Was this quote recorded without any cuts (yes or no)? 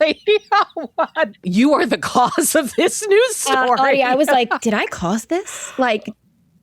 no